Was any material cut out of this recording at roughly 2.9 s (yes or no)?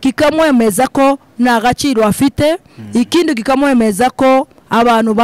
no